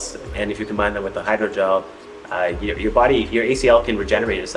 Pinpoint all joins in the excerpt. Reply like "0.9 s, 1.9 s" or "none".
none